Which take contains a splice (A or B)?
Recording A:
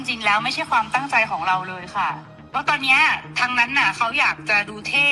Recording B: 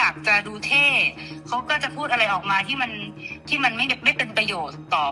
A